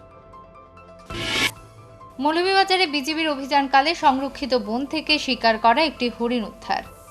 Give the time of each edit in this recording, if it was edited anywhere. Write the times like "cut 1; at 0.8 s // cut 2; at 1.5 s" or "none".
cut 1; at 0.9 s